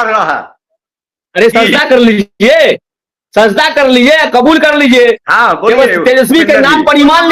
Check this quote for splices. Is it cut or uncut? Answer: uncut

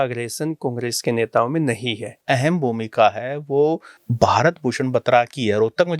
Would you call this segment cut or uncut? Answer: cut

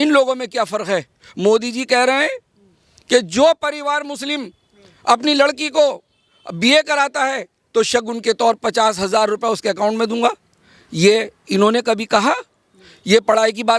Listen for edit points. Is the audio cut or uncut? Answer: uncut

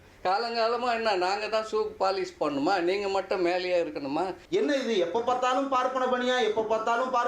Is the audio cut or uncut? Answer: cut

